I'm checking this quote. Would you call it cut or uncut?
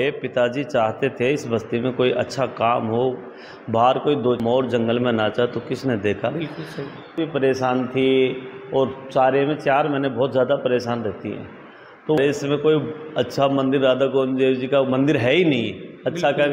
cut